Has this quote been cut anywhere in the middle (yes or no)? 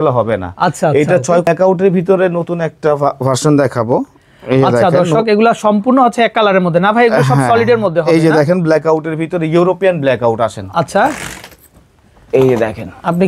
yes